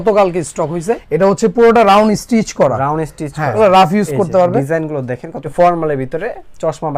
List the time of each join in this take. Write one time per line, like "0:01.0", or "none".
0:01.0
0:03.6
0:05.4